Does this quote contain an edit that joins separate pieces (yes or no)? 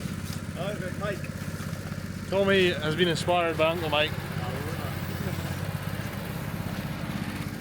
no